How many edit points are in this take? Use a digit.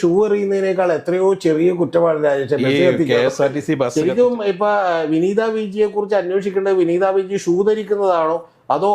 1